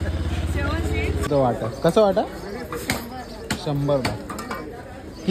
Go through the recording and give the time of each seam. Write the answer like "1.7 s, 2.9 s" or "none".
1.3 s

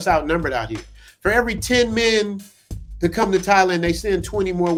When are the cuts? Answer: none

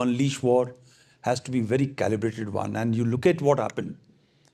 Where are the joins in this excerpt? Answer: none

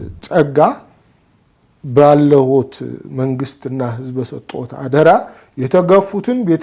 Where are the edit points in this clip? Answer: none

